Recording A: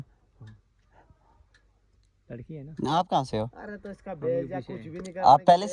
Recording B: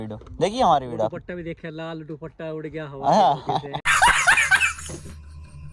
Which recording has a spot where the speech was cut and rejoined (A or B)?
B